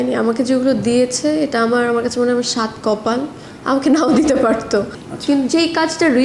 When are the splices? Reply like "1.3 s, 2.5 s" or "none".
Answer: 5.0 s